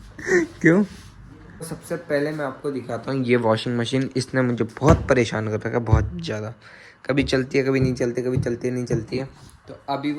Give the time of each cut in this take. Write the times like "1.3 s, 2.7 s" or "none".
1.8 s